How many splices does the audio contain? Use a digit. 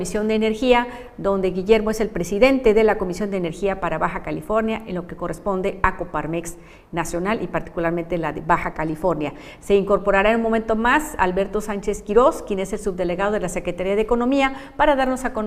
1